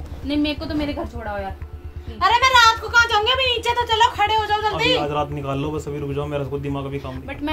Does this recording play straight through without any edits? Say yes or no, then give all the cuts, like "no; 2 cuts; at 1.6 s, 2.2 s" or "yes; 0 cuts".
yes; 0 cuts